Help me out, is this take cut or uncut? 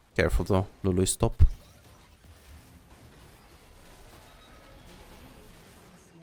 uncut